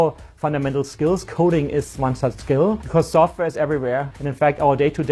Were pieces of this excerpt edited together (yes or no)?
yes